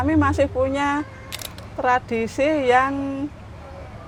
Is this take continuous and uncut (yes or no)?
yes